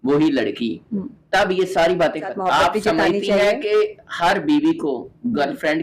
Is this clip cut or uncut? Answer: cut